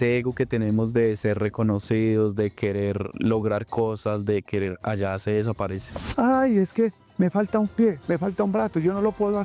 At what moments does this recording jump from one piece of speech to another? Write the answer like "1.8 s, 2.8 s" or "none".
6.0 s